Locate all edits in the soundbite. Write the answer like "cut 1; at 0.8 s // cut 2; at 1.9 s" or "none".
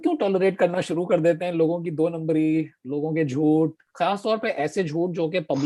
none